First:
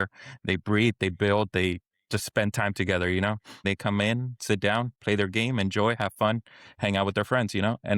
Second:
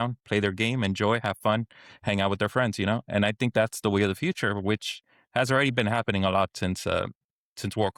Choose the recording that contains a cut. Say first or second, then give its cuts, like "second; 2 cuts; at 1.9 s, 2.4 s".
first; 1 cut; at 3.6 s